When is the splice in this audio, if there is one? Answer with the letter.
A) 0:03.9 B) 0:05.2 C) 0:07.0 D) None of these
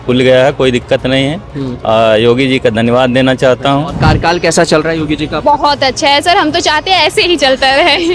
A